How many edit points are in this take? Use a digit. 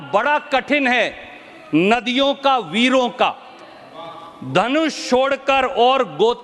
0